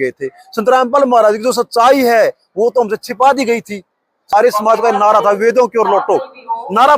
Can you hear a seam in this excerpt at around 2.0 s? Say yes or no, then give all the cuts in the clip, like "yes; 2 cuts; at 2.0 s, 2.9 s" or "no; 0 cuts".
no; 1 cut; at 4.2 s